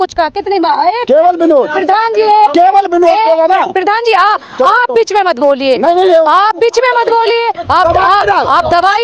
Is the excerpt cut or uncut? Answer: uncut